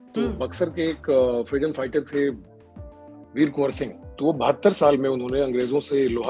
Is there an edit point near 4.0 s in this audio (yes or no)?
yes